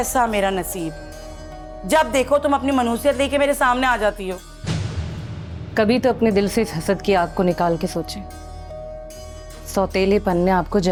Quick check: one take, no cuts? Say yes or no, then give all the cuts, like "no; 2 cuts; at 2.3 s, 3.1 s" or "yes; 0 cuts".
yes; 0 cuts